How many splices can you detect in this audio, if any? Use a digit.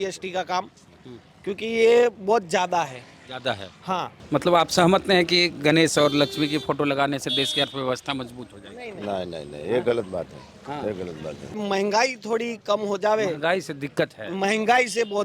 2